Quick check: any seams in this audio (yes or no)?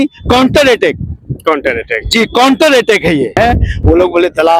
no